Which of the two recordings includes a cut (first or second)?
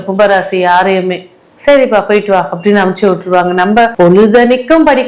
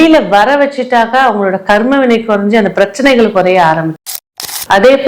second